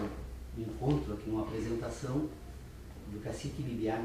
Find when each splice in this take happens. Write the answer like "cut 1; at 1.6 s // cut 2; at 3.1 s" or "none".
cut 1; at 2.1 s